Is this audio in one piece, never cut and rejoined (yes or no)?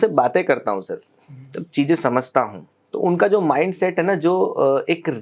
yes